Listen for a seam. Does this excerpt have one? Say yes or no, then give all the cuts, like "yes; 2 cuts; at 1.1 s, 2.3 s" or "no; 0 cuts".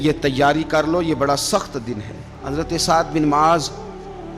yes; 1 cut; at 2.4 s